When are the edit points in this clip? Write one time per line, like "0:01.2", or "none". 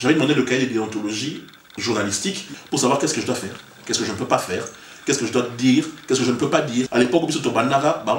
0:02.6
0:06.9